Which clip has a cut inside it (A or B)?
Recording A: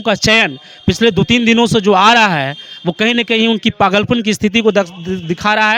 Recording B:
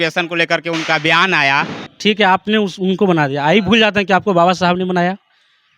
B